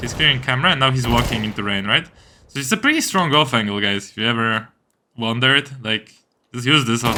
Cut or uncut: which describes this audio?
uncut